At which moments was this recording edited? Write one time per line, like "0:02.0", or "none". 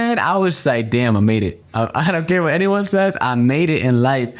0:01.6

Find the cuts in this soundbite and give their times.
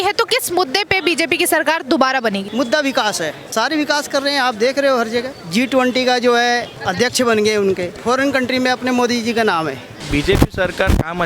0:02.5
0:03.4
0:05.4
0:06.8
0:07.9
0:10.0

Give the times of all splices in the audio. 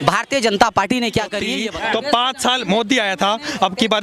0:01.6

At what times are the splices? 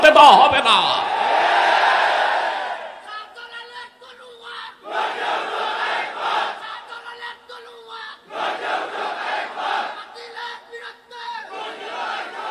none

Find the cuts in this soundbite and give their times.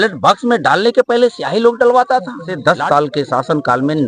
0:02.5

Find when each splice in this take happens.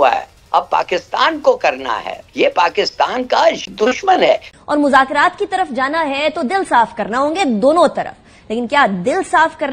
0:02.1
0:04.5

